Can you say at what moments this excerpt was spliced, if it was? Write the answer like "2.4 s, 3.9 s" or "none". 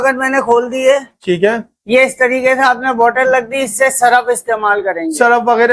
none